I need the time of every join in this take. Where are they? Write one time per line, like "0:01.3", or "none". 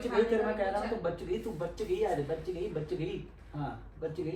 0:03.3